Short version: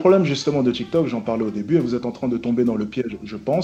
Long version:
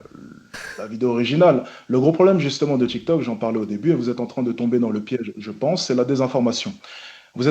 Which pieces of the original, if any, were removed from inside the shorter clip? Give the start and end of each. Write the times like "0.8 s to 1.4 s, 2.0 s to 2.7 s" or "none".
none